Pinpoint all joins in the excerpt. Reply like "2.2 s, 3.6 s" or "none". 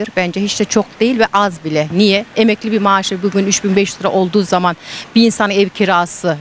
none